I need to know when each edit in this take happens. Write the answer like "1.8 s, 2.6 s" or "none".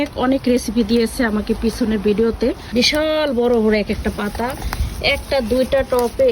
2.6 s

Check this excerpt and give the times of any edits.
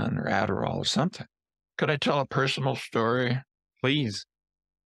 1.4 s

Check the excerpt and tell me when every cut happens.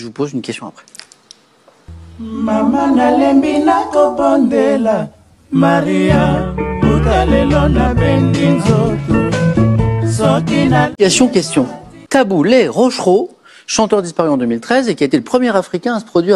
10.9 s

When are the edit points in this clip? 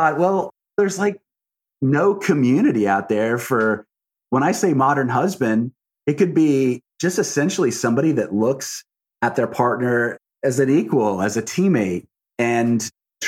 10.2 s

